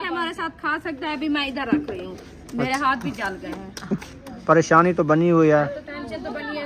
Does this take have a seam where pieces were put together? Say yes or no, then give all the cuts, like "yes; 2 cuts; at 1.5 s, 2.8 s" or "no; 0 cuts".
yes; 1 cut; at 4.2 s